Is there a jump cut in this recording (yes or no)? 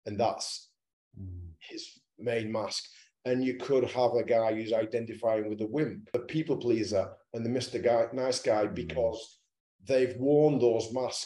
yes